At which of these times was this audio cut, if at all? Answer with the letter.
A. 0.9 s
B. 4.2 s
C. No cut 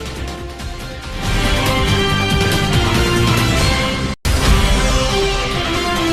C